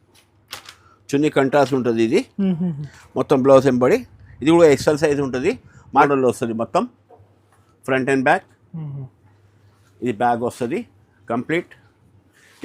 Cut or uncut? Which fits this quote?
cut